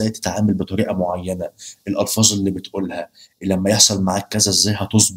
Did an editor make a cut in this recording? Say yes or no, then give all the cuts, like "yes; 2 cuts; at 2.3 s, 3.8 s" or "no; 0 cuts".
no; 0 cuts